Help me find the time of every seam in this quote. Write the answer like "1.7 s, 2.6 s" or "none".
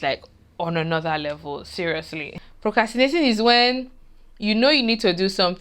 2.2 s